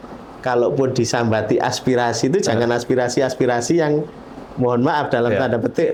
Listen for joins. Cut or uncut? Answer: uncut